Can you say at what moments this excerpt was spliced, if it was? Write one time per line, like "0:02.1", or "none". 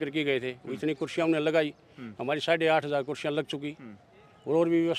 none